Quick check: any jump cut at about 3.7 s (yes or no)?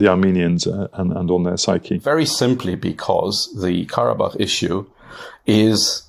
no